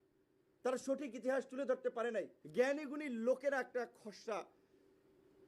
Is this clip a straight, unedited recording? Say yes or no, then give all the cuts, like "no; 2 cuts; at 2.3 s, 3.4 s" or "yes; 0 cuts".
no; 1 cut; at 2.4 s